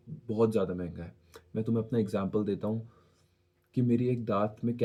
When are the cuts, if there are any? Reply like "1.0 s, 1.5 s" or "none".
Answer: none